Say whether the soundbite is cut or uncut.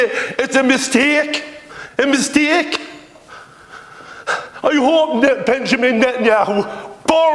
uncut